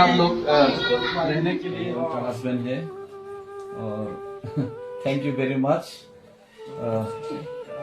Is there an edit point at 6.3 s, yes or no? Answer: no